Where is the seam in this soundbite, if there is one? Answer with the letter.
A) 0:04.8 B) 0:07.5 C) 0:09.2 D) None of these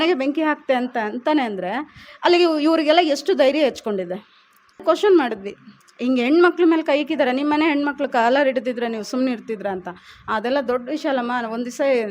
A